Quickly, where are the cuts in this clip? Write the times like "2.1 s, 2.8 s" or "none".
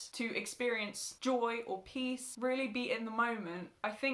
2.3 s